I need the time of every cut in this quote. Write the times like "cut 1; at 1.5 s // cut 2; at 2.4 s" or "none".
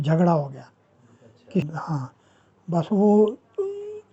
cut 1; at 1.7 s